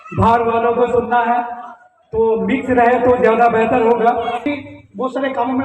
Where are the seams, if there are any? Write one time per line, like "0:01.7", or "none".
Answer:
0:04.5